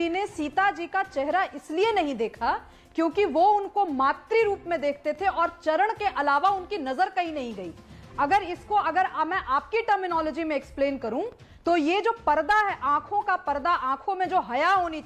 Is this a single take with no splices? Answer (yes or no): yes